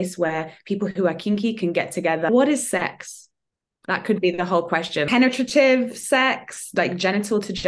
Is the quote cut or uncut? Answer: cut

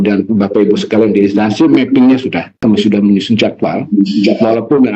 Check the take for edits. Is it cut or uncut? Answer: cut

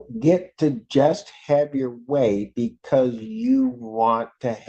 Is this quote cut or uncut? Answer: uncut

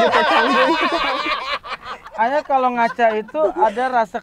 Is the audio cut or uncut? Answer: cut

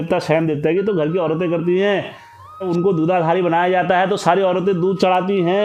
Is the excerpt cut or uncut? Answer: cut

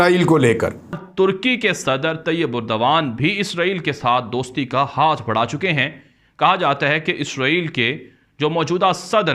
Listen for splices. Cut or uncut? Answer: cut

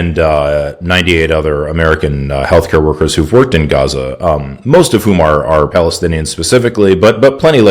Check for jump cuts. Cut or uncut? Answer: cut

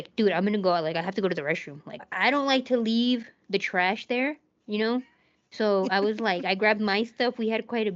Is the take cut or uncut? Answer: cut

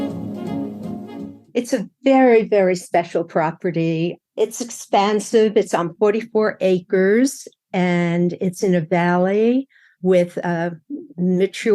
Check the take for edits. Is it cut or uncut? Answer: cut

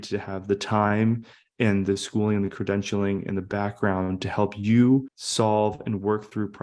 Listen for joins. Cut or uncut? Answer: cut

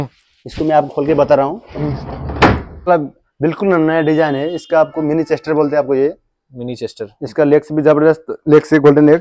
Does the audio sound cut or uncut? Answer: cut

